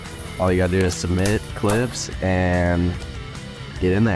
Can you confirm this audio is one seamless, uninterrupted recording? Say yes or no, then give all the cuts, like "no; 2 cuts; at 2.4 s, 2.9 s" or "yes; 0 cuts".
yes; 0 cuts